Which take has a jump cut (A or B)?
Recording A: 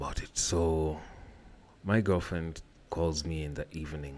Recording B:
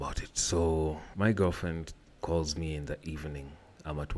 B